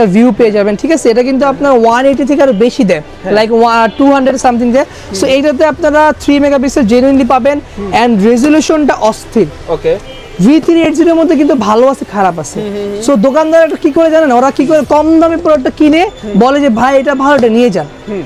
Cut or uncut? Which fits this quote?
uncut